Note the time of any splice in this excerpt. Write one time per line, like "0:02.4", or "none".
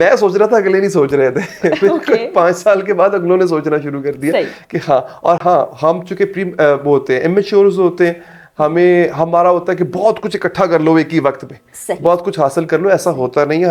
none